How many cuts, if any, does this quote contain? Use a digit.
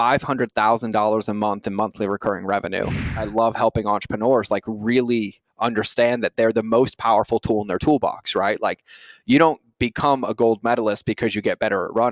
1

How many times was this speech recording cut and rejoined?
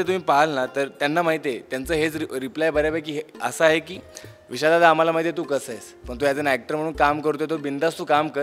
0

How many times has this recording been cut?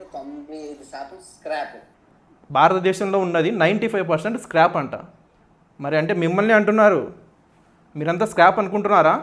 1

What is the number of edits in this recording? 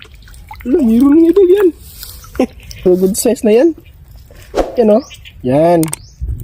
0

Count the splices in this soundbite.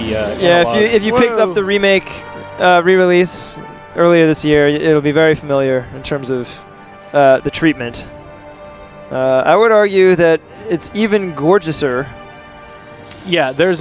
1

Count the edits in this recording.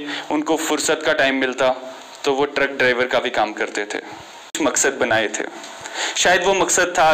1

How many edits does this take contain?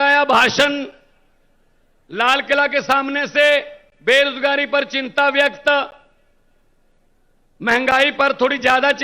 0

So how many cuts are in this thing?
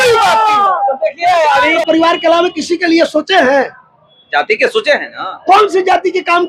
1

